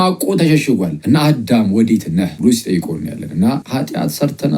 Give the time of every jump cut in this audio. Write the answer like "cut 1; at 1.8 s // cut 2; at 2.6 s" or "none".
cut 1; at 0.9 s // cut 2; at 2.3 s // cut 3; at 3.6 s